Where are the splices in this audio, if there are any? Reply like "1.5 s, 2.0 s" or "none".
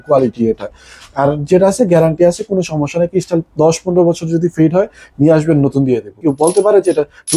6.1 s